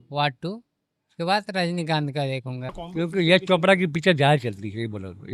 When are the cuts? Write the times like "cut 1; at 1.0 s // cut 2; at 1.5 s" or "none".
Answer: cut 1; at 2.8 s